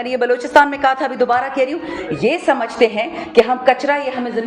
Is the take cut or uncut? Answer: uncut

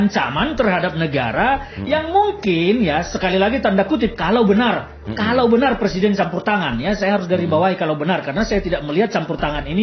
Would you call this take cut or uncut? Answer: uncut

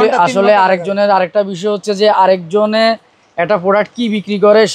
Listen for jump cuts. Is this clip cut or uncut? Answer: uncut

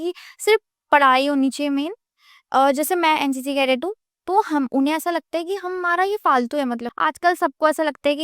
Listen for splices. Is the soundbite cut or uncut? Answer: cut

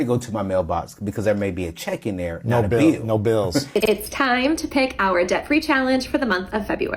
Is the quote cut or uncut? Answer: cut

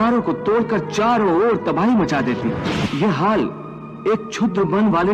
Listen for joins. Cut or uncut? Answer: cut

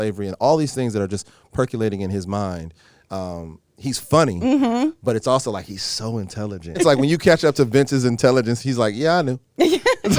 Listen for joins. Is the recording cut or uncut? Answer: cut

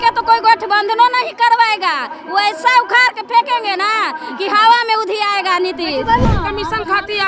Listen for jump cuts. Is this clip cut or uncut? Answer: cut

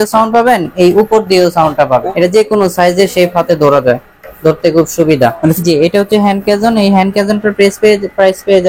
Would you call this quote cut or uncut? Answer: cut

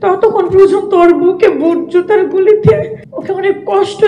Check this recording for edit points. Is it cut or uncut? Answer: cut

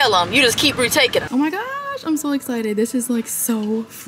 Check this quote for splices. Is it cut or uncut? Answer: cut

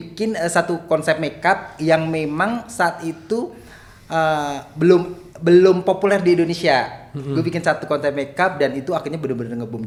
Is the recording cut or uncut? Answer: uncut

